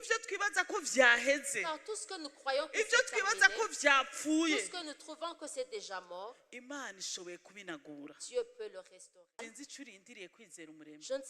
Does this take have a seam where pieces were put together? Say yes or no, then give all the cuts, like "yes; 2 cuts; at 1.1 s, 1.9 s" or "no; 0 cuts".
yes; 1 cut; at 9.4 s